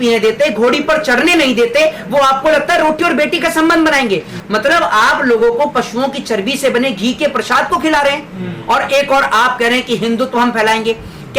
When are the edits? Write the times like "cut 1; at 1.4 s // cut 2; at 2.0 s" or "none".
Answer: cut 1; at 4.4 s